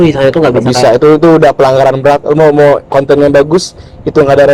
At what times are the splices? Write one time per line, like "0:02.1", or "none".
none